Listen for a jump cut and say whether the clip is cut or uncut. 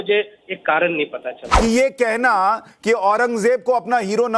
cut